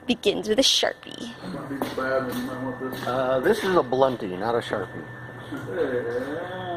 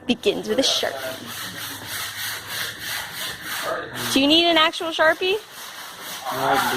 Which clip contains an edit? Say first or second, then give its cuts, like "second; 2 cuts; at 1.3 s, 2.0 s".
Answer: second; 1 cut; at 1.0 s